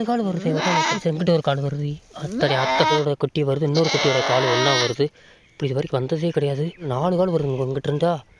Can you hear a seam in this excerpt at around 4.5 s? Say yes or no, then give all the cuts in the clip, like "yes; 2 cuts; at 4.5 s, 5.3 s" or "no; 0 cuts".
no; 3 cuts; at 1.0 s, 2.9 s, 6.9 s